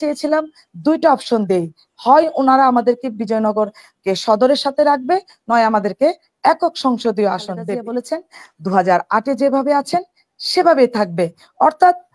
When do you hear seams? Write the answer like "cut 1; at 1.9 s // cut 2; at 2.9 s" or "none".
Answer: cut 1; at 7.7 s